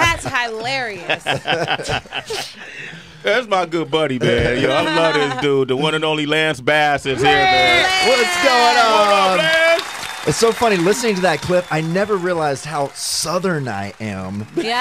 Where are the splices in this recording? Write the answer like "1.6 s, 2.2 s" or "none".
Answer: 11.0 s